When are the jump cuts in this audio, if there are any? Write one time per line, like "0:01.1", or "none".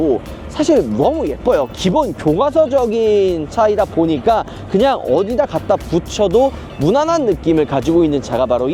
none